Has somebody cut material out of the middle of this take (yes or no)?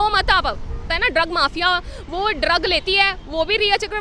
yes